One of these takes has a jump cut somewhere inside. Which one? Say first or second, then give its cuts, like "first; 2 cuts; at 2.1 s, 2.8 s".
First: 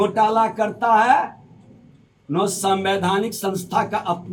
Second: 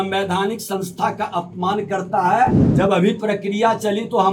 second; 1 cut; at 2.6 s